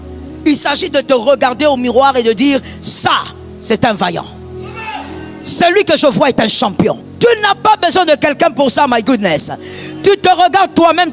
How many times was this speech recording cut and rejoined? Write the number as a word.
one